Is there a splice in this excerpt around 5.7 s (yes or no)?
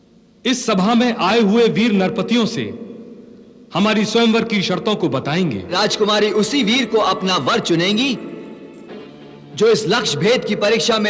yes